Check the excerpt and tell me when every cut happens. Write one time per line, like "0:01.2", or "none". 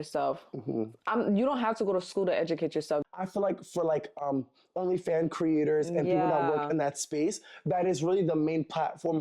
0:03.0